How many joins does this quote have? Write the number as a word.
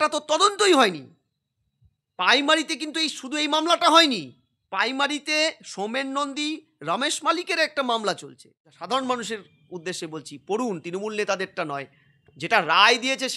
one